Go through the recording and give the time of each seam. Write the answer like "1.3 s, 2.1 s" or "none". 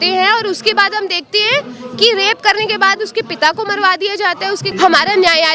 4.7 s